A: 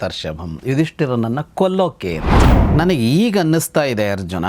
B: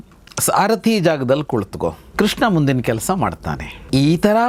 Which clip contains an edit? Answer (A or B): A